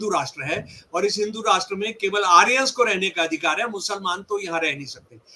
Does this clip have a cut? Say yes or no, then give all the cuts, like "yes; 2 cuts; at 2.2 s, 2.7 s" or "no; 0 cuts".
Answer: no; 0 cuts